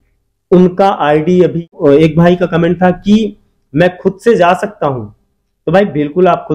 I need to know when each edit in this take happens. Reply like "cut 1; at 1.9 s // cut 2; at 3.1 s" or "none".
cut 1; at 1.7 s

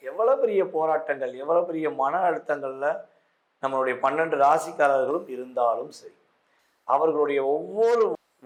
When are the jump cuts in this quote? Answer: none

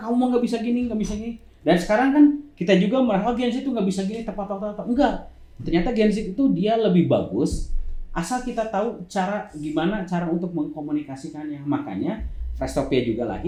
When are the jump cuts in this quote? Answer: none

